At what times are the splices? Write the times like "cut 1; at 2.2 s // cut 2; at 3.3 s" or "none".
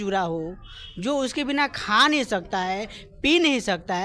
none

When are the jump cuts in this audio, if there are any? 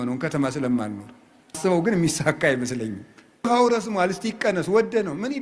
cut 1; at 1.6 s // cut 2; at 3.5 s

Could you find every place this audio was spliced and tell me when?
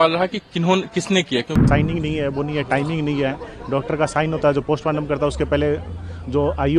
cut 1; at 1.6 s

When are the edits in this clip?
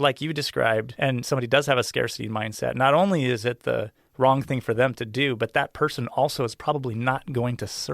cut 1; at 0.9 s

